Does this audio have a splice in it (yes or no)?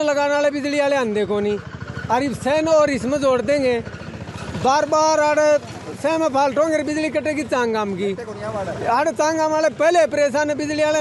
no